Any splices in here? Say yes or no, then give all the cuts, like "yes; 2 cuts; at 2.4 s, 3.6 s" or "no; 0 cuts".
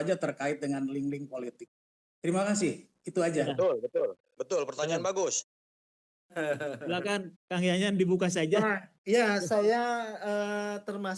no; 0 cuts